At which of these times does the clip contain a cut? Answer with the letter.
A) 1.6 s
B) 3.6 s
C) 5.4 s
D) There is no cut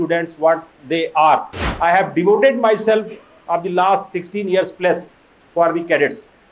A